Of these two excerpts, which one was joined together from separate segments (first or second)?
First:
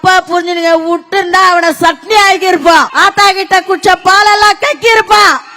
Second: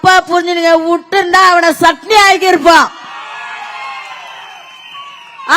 first